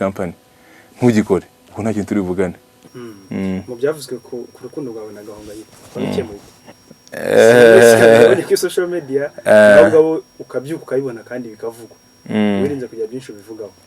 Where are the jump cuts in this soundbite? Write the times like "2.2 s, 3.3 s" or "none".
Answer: 2.8 s